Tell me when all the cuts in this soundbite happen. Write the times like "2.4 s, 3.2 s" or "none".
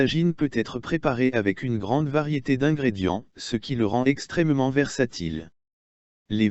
none